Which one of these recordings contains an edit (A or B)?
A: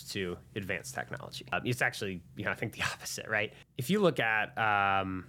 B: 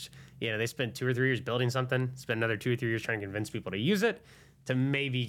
A